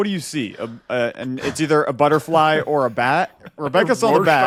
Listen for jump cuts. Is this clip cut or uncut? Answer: uncut